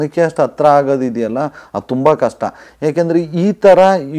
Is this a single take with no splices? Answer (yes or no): yes